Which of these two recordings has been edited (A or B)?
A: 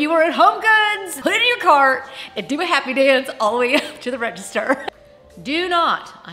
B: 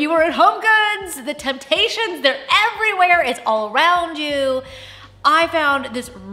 A